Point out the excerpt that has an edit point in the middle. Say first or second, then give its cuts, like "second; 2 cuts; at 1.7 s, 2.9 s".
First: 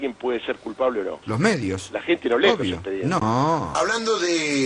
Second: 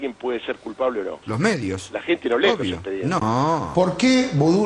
second; 1 cut; at 3.7 s